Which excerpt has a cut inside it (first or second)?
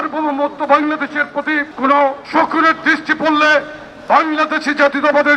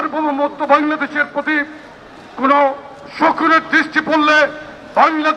first